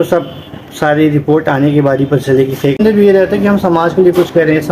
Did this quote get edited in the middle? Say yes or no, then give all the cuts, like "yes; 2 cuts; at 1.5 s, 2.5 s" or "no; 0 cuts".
yes; 1 cut; at 2.8 s